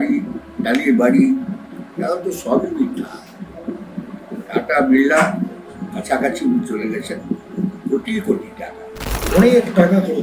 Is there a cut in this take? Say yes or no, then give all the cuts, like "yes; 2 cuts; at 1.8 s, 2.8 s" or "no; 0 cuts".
yes; 1 cut; at 9.3 s